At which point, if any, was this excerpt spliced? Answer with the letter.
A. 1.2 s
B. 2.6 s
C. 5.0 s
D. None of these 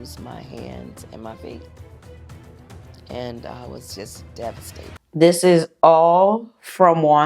C